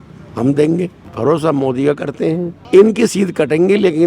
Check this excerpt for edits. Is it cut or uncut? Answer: cut